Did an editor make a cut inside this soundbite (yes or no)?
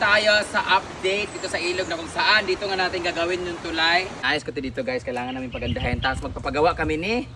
yes